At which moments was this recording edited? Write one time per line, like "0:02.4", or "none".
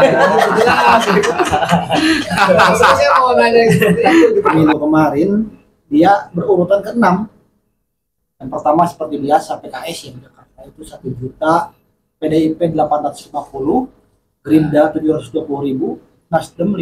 0:04.5